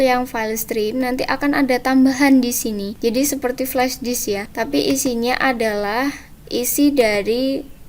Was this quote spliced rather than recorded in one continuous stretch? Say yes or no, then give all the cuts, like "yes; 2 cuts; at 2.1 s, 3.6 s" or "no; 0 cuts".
yes; 2 cuts; at 2.9 s, 4.5 s